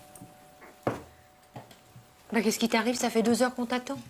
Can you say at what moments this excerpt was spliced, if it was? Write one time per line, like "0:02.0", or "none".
0:03.0